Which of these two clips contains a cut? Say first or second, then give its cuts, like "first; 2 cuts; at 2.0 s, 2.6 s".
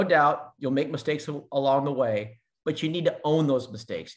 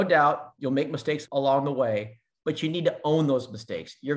second; 1 cut; at 1.2 s